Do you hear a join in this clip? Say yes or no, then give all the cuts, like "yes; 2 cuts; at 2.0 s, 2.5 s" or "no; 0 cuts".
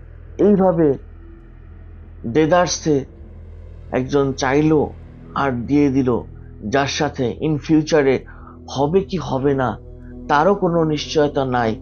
no; 0 cuts